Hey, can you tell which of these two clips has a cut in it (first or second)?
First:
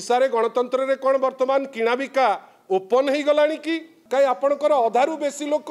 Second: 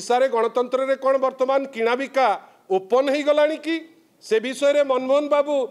first